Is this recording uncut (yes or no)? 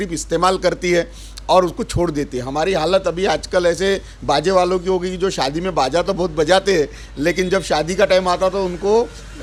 yes